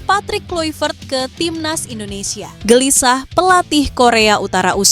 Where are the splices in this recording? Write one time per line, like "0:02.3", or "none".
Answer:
0:02.5

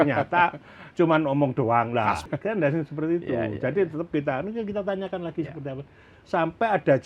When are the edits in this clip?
0:02.2

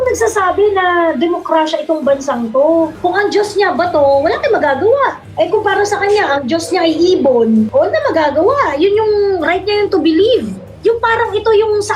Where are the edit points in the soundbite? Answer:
0:02.9
0:05.2
0:10.7

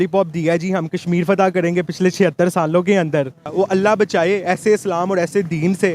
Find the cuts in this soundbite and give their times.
0:03.5

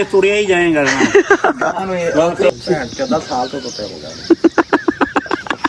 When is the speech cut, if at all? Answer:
0:02.5

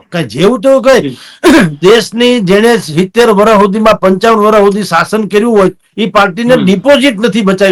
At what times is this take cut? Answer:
none

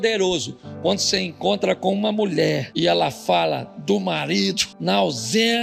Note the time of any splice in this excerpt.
0:02.7
0:04.7

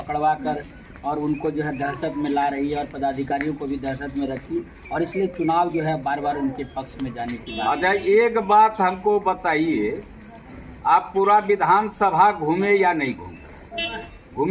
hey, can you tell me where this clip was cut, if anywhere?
none

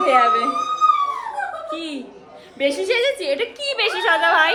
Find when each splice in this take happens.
none

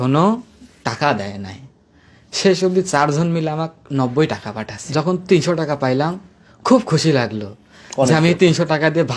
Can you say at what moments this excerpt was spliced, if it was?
0:04.8

